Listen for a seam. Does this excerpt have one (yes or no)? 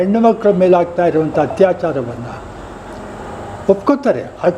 no